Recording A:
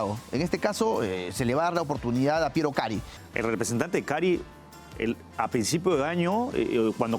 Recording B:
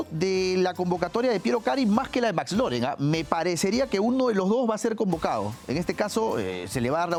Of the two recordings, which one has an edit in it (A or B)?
A